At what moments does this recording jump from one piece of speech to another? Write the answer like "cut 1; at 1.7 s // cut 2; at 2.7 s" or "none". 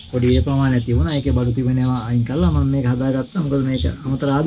none